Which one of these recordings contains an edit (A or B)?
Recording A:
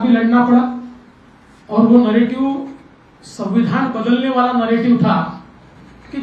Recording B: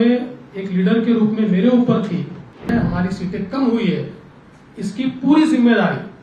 B